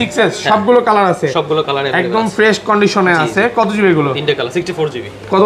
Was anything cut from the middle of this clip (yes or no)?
no